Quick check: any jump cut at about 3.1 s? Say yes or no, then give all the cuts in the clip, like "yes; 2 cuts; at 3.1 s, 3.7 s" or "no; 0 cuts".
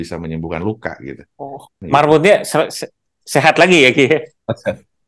no; 1 cut; at 1.7 s